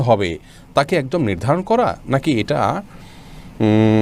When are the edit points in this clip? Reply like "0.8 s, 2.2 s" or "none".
none